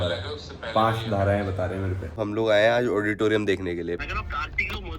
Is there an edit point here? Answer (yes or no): yes